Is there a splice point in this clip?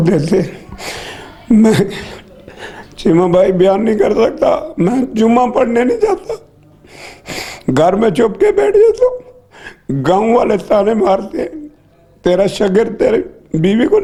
no; 0 cuts

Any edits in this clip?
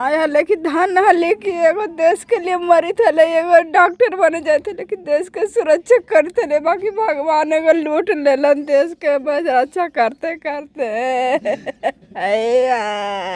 no; 0 cuts

